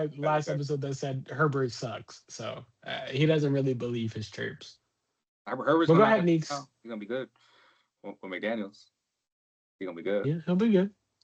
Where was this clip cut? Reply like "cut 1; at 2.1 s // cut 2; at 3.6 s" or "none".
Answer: none